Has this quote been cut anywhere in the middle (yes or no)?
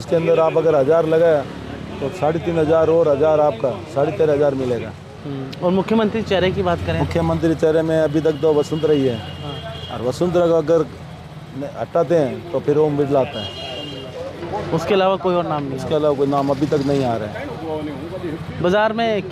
no